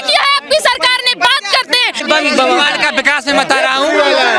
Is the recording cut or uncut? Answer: cut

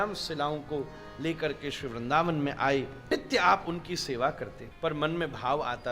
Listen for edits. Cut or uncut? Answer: cut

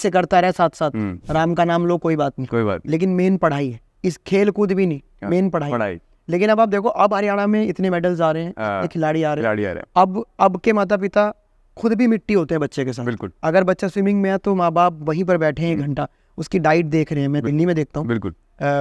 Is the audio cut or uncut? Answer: cut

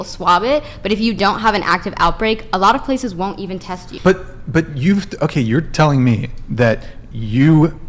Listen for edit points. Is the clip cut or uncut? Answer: uncut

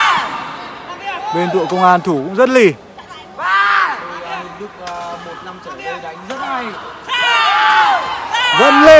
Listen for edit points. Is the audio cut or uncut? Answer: uncut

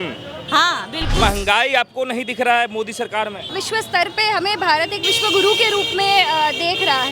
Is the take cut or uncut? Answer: cut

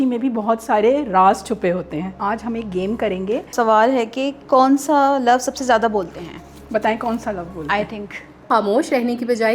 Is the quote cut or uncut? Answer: cut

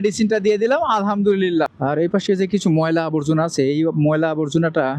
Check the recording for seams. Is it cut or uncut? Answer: cut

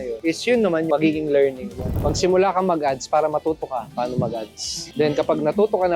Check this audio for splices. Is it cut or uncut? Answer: cut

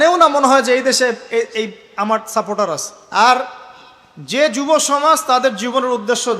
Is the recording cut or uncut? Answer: cut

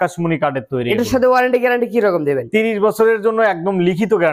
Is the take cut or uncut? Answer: uncut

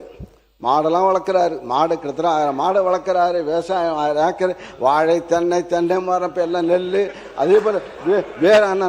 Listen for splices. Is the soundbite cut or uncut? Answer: uncut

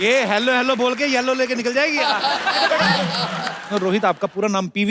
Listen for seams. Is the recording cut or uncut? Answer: cut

